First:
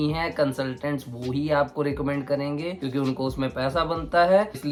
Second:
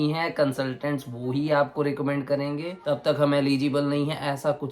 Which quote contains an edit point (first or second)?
second